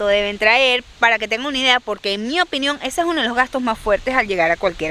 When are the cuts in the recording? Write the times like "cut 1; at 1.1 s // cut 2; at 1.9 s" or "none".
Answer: none